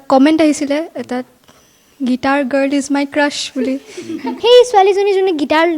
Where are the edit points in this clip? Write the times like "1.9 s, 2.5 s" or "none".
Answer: 4.3 s